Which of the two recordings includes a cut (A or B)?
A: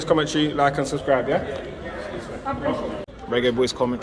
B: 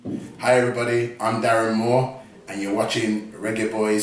A